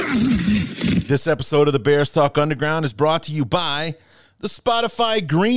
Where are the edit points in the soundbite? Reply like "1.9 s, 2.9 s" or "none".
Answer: 1.1 s